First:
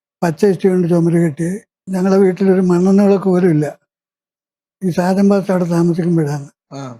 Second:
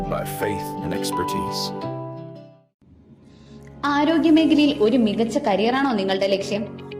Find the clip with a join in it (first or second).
first